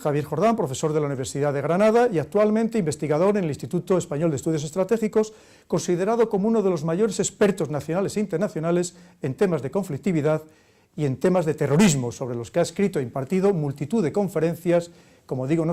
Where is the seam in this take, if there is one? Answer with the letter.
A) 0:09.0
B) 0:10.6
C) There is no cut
A